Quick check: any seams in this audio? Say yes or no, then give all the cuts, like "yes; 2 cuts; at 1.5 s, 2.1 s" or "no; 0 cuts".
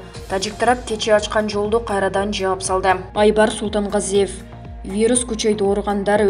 yes; 1 cut; at 3.1 s